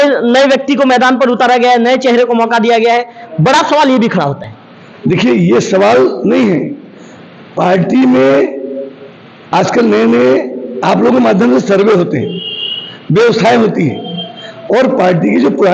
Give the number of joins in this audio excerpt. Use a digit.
0